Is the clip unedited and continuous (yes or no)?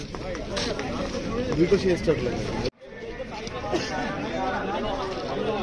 yes